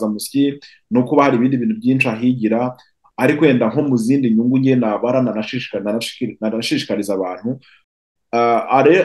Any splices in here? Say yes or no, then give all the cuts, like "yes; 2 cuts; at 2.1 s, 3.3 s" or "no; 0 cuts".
yes; 1 cut; at 7.8 s